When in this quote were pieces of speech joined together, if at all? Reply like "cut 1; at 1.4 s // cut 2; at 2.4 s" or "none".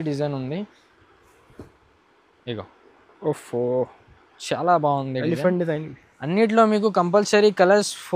none